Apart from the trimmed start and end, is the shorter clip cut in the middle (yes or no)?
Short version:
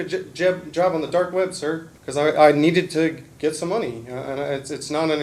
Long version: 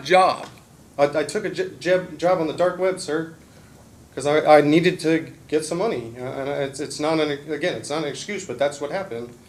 yes